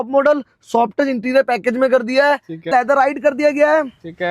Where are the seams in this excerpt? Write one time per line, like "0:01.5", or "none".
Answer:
0:02.7